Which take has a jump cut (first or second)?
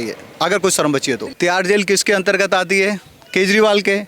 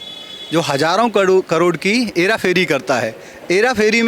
first